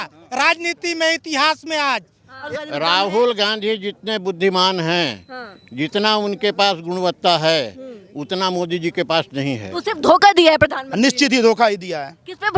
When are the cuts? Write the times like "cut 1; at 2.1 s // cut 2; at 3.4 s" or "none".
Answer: cut 1; at 2.5 s // cut 2; at 9.7 s